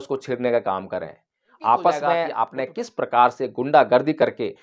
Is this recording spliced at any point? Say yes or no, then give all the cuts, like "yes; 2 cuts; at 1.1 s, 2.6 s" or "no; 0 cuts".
yes; 1 cut; at 2.3 s